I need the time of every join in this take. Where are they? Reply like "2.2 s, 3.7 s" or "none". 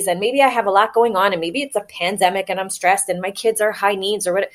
none